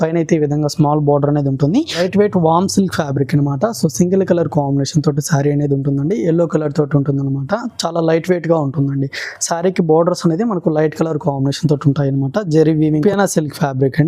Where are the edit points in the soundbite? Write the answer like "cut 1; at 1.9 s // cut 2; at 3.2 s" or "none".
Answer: cut 1; at 2.0 s // cut 2; at 13.0 s